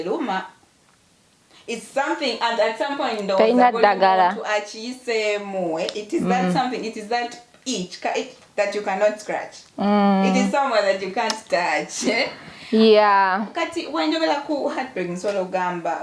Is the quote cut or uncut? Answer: uncut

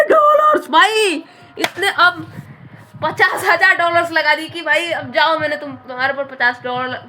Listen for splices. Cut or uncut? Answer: uncut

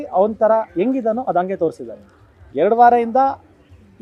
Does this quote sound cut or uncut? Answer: uncut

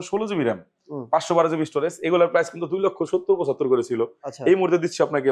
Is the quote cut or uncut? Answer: uncut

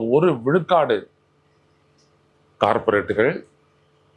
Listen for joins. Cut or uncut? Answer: uncut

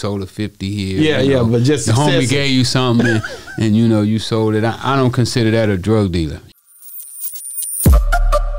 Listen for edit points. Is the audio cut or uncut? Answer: cut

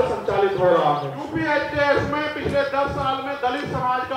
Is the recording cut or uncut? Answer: cut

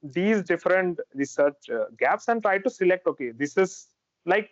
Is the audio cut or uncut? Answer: uncut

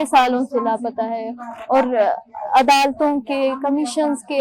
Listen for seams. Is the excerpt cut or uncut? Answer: uncut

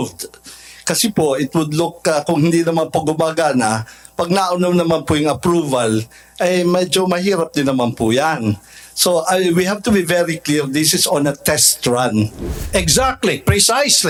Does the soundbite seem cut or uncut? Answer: uncut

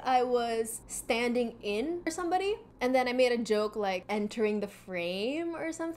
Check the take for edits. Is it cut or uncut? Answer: cut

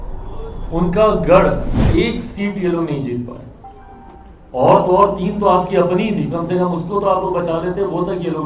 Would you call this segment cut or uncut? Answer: cut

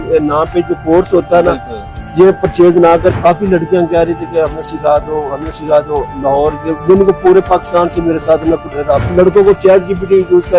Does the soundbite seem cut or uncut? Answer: cut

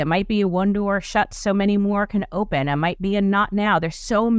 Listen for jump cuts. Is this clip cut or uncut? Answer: uncut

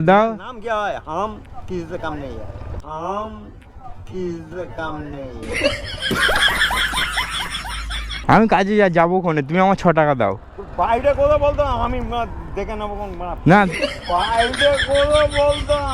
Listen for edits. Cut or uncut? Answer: cut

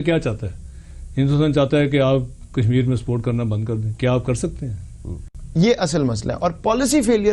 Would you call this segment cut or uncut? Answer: cut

